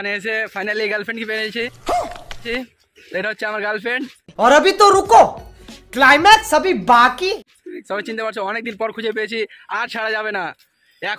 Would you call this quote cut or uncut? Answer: uncut